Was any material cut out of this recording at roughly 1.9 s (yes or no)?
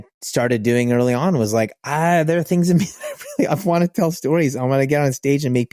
no